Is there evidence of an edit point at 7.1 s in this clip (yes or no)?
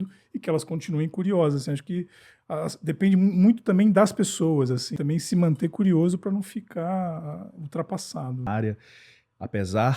no